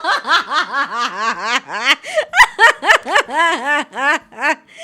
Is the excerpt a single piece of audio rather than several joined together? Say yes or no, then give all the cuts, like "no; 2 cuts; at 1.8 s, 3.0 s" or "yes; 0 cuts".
yes; 0 cuts